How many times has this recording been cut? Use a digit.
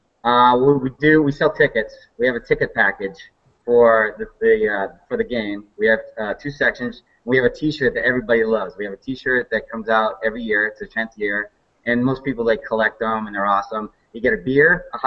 1